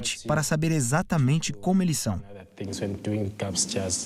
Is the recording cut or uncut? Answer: uncut